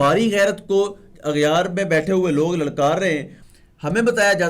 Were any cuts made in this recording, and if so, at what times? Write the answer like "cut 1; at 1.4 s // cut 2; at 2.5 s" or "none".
cut 1; at 1.1 s // cut 2; at 3.4 s

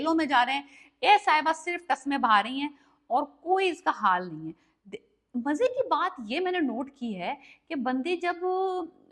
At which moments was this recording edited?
none

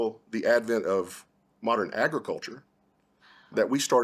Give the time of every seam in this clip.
cut 1; at 1.9 s

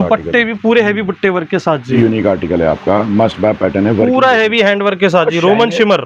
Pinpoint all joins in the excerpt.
cut 1; at 1.9 s

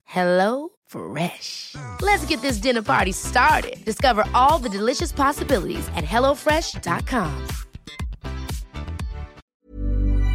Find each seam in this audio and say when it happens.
cut 1; at 9.4 s

